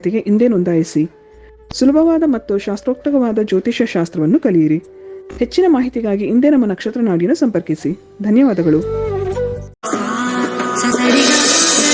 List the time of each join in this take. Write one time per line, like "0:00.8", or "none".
0:09.7